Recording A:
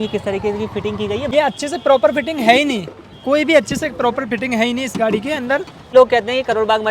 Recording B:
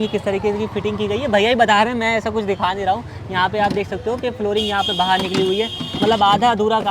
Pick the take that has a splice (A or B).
A